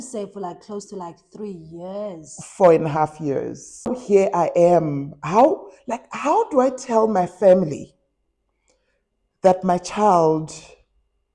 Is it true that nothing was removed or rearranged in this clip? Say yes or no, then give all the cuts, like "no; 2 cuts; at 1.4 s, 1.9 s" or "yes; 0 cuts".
no; 1 cut; at 4.0 s